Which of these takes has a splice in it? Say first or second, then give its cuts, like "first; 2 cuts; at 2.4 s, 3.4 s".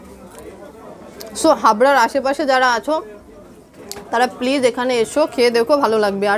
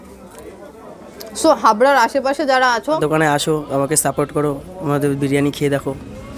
second; 1 cut; at 3.0 s